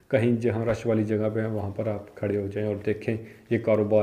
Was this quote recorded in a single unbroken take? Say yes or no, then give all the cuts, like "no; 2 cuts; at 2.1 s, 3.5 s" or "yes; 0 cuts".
yes; 0 cuts